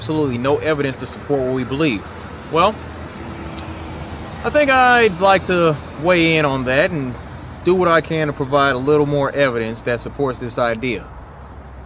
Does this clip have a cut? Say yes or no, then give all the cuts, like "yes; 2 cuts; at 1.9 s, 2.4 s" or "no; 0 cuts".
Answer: yes; 1 cut; at 7.2 s